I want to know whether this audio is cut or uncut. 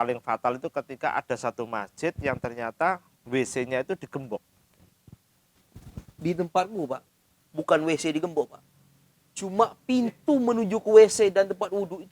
uncut